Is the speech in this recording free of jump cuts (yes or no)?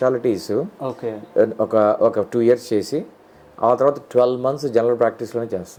yes